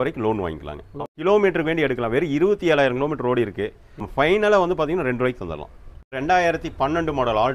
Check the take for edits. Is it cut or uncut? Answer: cut